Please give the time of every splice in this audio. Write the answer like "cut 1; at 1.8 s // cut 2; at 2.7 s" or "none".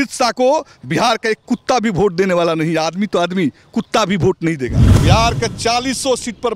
cut 1; at 4.9 s